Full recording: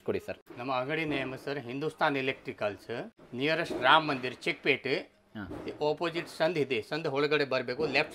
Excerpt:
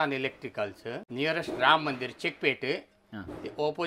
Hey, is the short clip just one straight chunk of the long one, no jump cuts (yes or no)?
no